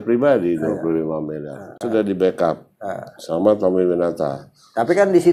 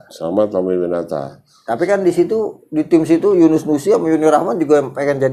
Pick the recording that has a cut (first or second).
first